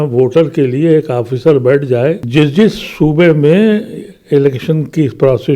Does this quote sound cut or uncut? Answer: cut